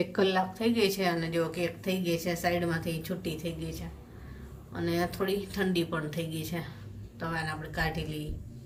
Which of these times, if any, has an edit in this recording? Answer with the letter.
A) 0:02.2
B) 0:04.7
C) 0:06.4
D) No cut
D